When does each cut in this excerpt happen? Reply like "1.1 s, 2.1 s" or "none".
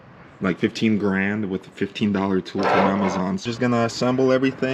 3.4 s

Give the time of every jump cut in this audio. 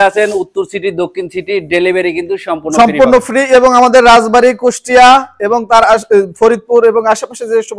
none

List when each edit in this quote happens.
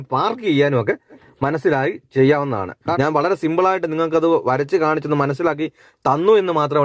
1.1 s, 2.9 s

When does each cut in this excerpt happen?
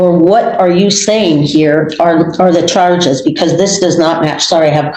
none

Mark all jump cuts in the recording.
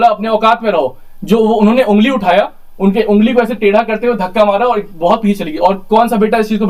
none

